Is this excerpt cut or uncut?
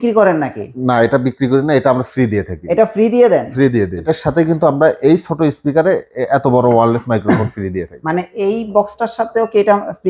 cut